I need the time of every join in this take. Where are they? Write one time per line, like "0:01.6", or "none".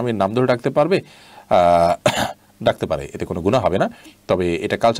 none